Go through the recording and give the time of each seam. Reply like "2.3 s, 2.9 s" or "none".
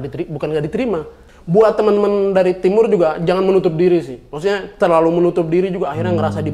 1.3 s